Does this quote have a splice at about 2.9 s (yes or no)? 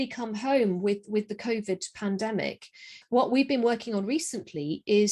yes